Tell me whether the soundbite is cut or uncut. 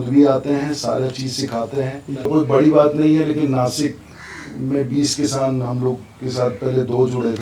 cut